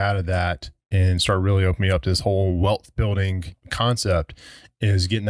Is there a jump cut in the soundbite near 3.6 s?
yes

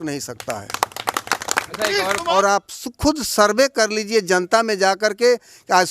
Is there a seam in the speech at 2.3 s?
yes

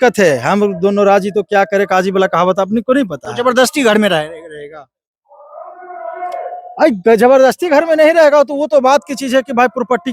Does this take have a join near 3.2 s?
no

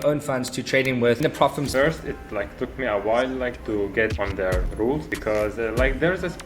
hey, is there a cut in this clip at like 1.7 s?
yes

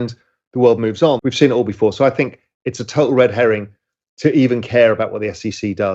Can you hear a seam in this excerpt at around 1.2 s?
yes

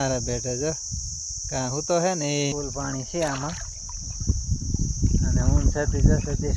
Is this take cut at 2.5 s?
yes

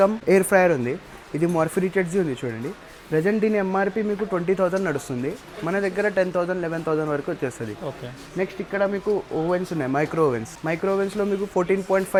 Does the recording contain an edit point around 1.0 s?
no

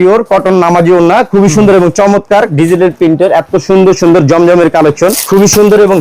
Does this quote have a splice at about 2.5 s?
yes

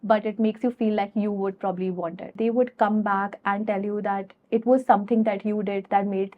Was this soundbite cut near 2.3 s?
yes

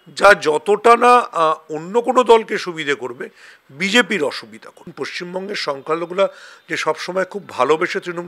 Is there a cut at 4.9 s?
yes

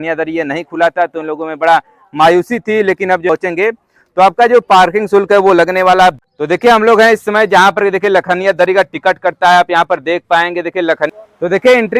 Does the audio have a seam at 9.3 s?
no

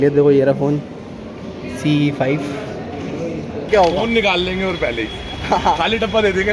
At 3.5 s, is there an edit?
yes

